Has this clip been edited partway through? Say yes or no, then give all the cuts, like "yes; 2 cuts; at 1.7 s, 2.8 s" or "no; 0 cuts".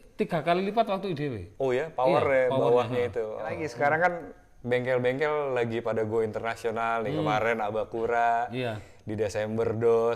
yes; 1 cut; at 3.7 s